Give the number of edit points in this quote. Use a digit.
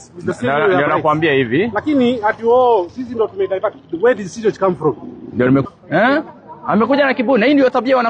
1